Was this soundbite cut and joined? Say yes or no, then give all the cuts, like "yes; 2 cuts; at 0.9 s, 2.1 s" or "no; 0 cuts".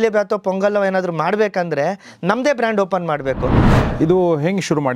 yes; 1 cut; at 3.6 s